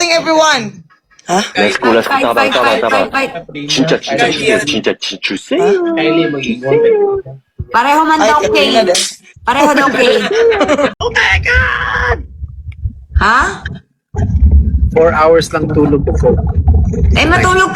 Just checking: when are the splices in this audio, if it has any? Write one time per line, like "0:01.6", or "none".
0:10.9